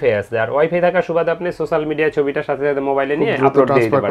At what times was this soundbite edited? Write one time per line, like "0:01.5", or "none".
none